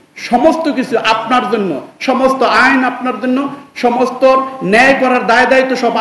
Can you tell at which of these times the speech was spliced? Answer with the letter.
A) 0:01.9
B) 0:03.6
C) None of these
C